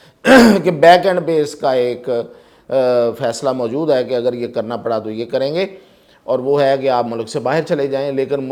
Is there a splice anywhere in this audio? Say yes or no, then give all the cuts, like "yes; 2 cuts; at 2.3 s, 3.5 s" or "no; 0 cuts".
no; 0 cuts